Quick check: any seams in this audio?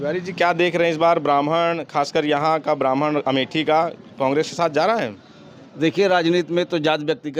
no; 0 cuts

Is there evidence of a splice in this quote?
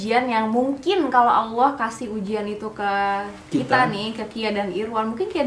no; 0 cuts

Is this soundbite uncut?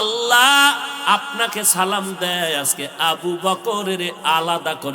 yes; 0 cuts

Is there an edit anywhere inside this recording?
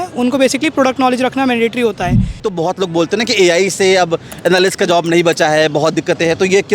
yes; 1 cut; at 2.4 s

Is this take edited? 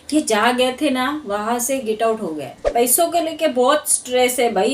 yes; 1 cut; at 2.6 s

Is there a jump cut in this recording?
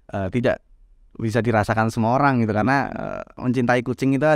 yes; 1 cut; at 3.4 s

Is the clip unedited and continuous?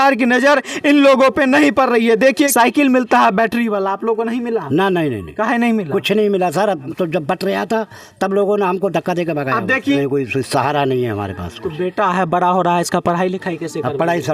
no; 3 cuts; at 2.5 s, 6.9 s, 10.0 s

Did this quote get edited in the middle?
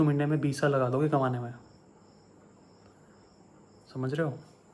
no; 0 cuts

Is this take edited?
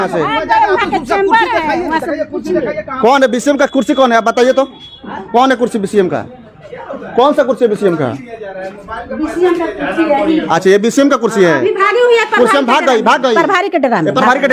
no; 0 cuts

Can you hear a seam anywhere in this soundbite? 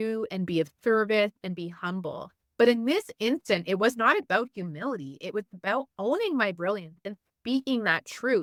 no; 0 cuts

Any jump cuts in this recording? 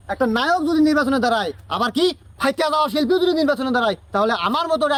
no; 0 cuts

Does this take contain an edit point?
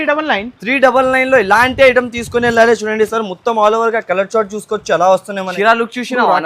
yes; 1 cut; at 5.4 s

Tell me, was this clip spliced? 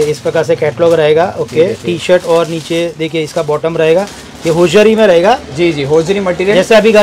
no; 0 cuts

